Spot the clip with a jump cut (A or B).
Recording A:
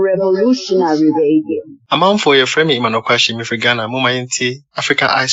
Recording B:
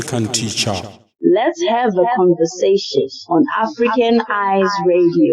B